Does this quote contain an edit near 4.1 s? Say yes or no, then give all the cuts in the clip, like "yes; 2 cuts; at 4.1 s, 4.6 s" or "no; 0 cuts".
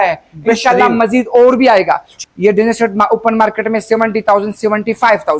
no; 1 cut; at 2.1 s